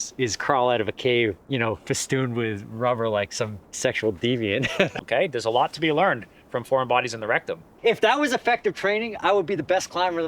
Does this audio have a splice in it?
yes; 3 cuts; at 1.4 s, 4.9 s, 7.8 s

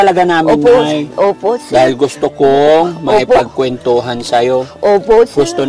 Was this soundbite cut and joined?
no; 0 cuts

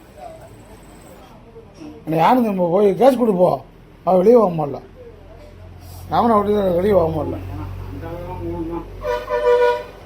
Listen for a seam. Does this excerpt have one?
yes; 1 cut; at 1.2 s

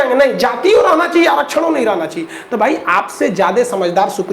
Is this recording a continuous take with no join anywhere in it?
yes; 0 cuts

